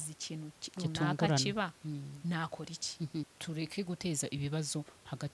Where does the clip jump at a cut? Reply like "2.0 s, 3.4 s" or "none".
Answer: 3.4 s